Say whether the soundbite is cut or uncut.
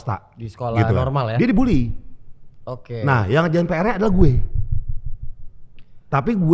uncut